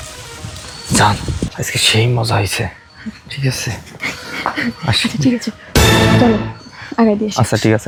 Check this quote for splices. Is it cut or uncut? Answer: uncut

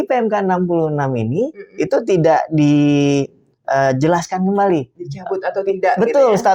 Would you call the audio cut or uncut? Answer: uncut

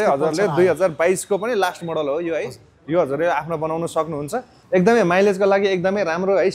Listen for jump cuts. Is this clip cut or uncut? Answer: cut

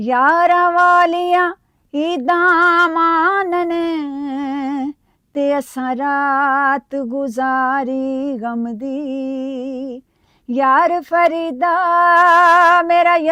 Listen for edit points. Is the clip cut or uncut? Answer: uncut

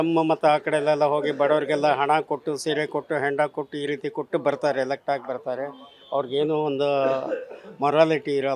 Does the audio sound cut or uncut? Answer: uncut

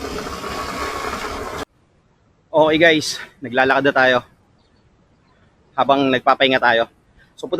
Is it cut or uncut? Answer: cut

